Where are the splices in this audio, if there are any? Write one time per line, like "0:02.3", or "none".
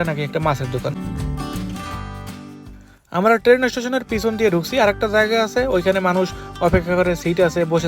0:00.9

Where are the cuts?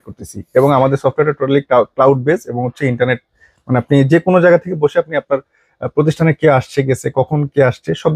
none

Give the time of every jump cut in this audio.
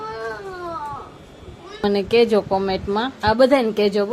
0:01.8

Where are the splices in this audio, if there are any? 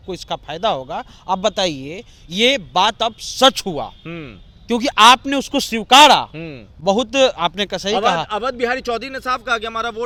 none

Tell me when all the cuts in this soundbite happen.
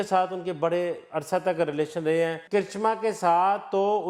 none

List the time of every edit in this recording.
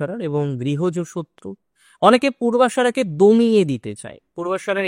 none

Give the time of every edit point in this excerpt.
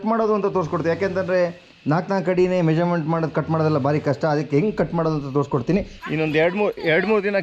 0:06.0

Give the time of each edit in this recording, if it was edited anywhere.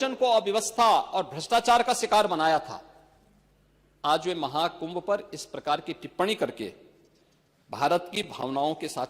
none

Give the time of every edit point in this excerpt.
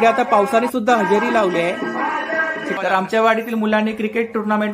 0:02.8

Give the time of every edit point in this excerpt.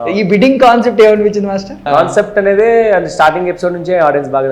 0:01.8

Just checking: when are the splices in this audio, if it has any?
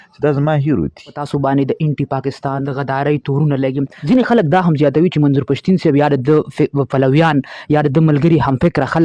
0:01.2
0:02.6
0:03.9

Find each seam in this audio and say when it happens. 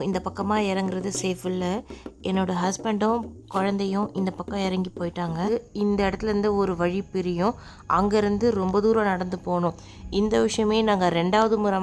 0:05.5

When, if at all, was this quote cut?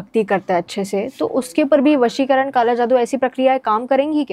none

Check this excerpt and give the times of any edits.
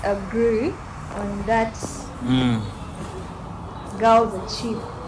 none

